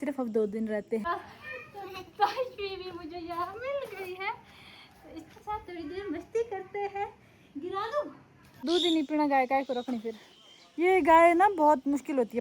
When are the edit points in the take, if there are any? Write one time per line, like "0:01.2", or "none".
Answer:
0:01.0
0:08.6